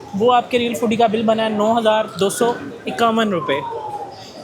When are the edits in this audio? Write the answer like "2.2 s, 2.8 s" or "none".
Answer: none

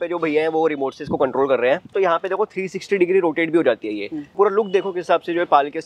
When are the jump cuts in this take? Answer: 1.9 s, 4.4 s

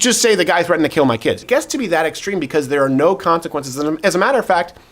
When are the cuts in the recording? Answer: 1.4 s

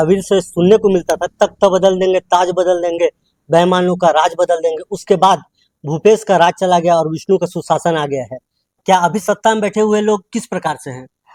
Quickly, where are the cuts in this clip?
none

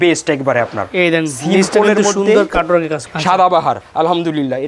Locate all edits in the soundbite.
3.0 s

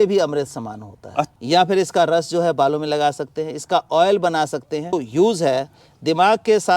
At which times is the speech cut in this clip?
1.4 s, 5.0 s

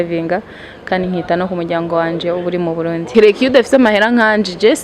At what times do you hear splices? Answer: 3.0 s

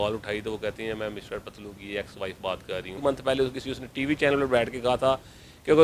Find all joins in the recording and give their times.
3.0 s

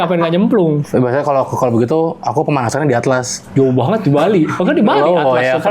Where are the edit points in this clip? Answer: 0.8 s, 3.4 s

